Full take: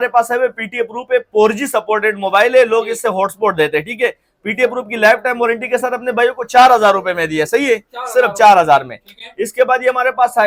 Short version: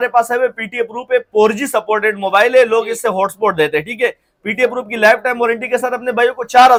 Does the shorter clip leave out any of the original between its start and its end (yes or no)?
no